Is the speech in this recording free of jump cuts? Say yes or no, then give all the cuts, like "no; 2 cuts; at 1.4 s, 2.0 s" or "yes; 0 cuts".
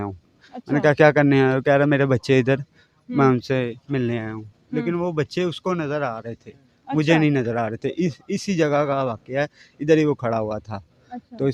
yes; 0 cuts